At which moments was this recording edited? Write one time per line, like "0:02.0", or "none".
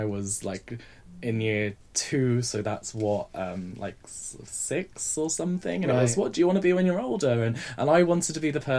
none